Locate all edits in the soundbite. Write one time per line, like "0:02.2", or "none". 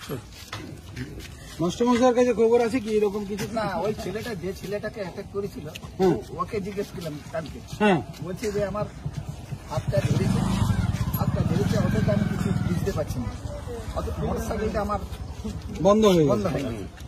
none